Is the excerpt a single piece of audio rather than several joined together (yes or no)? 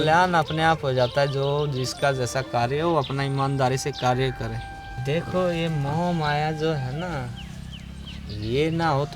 no